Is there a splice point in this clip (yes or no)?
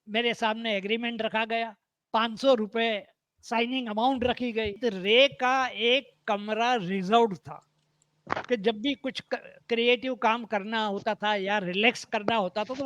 yes